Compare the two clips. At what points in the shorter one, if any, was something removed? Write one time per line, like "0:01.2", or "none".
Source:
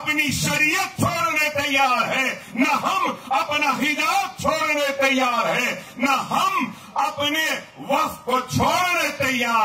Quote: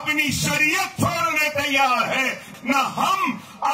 0:02.4